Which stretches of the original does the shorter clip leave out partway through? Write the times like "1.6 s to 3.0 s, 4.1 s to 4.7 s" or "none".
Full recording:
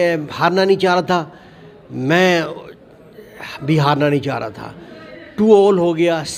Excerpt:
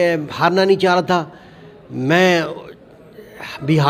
none